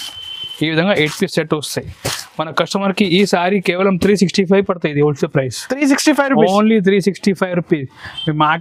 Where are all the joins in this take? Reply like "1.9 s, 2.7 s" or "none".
none